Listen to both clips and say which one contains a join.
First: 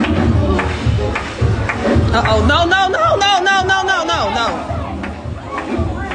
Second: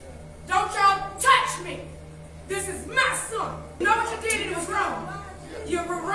second; 1 cut; at 3.8 s

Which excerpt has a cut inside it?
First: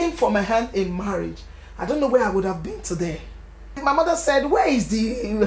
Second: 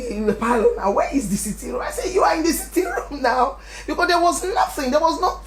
first; 1 cut; at 3.8 s

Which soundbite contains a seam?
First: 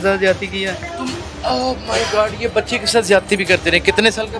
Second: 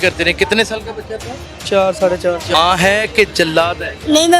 second; 1 cut; at 2.5 s

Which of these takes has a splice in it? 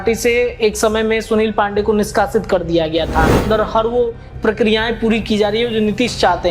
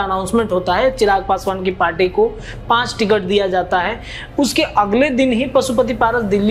first; 1 cut; at 3.4 s

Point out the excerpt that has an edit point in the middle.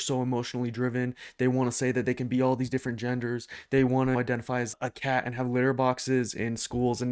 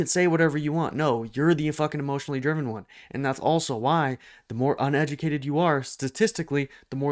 first; 1 cut; at 4.5 s

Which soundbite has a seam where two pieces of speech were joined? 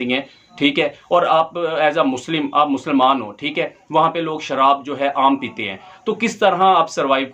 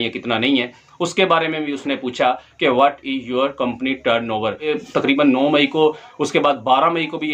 second; 1 cut; at 4.6 s

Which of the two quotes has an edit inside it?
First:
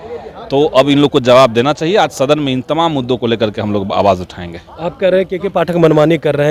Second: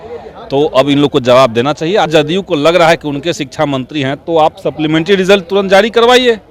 second; 1 cut; at 2.1 s

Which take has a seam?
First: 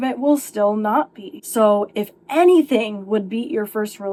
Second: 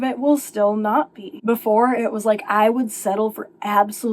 second; 1 cut; at 1.2 s

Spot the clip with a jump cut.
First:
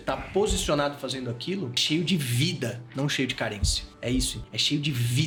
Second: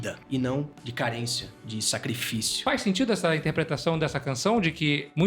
second; 1 cut; at 2.6 s

